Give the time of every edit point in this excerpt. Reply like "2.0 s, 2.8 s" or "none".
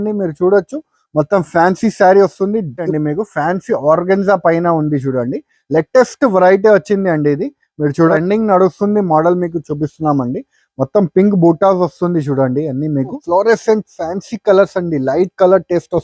2.9 s, 8.1 s, 13.2 s